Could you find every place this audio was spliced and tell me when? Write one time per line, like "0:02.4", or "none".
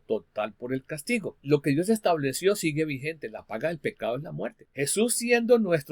0:01.3
0:04.6